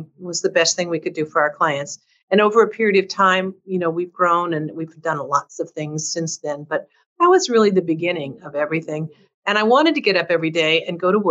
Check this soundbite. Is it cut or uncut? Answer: uncut